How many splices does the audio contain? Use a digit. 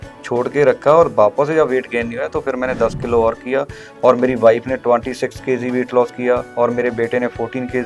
0